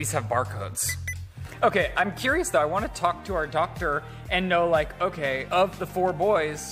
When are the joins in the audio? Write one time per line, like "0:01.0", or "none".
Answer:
0:01.4